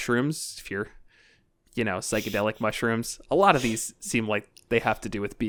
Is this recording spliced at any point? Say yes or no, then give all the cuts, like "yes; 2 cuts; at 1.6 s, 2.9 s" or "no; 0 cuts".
no; 0 cuts